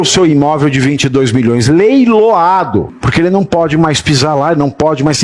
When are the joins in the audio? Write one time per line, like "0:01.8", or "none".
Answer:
0:03.0